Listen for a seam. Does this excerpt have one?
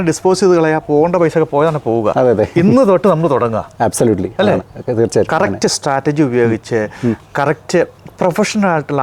no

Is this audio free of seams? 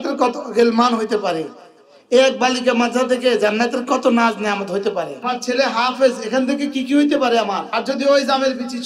no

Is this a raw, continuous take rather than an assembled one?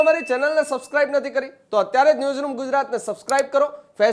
yes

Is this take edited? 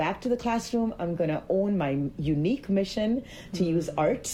no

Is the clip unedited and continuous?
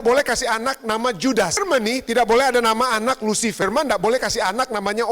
no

